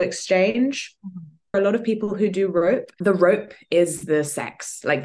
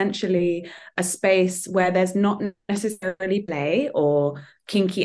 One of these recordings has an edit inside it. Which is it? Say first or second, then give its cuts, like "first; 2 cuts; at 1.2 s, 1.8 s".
first; 2 cuts; at 1.5 s, 2.9 s